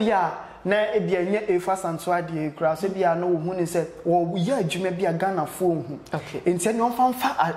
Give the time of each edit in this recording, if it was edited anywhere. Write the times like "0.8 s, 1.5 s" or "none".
none